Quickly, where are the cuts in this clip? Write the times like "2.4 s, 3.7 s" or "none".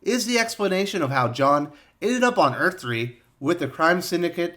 3.2 s